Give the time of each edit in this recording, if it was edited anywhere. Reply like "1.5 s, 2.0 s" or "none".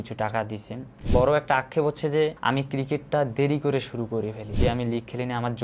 0.9 s, 4.5 s